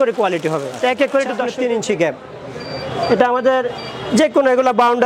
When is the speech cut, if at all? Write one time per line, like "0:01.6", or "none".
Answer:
0:01.5